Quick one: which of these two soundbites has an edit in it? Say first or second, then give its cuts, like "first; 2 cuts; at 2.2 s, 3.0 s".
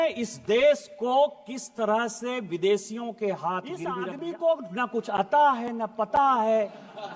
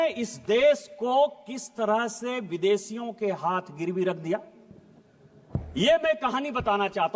first; 1 cut; at 4.0 s